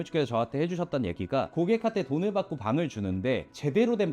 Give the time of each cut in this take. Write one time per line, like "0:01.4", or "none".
0:01.5